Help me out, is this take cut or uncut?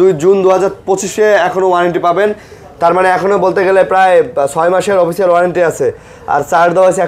uncut